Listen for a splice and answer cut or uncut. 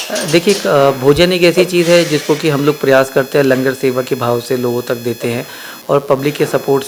uncut